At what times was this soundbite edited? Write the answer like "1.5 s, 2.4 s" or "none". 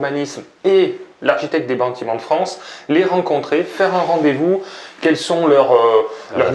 none